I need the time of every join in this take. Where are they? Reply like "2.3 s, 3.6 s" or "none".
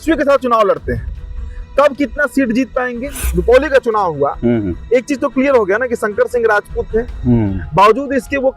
3.2 s